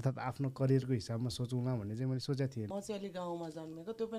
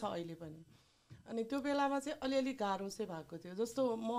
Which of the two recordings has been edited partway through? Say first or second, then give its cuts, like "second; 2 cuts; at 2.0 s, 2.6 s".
first; 1 cut; at 2.7 s